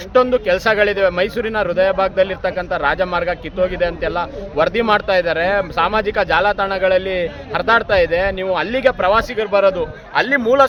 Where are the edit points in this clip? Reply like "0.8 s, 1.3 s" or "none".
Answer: none